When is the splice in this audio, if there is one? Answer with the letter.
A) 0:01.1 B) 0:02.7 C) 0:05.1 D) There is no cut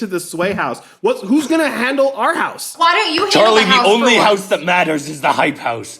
B